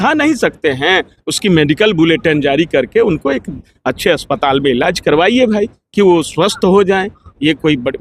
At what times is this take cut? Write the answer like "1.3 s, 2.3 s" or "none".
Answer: none